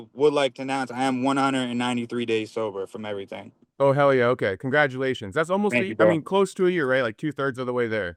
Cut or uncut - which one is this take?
uncut